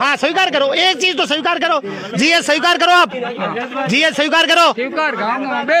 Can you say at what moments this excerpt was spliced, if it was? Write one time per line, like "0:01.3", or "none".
none